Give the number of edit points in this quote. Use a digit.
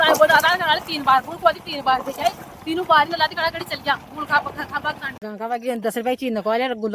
1